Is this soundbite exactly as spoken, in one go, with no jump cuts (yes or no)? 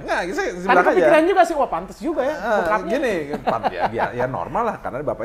yes